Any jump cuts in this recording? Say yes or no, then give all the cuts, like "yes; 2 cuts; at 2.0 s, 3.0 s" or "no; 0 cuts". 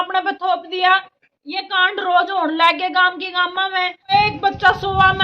yes; 1 cut; at 4.1 s